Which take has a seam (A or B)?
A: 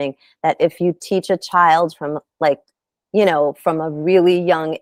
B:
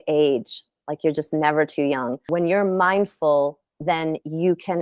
B